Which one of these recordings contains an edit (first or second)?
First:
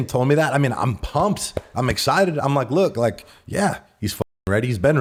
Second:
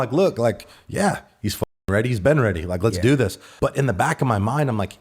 second